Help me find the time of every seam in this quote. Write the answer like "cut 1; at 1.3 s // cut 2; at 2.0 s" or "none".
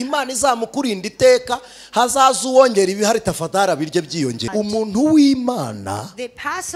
cut 1; at 4.5 s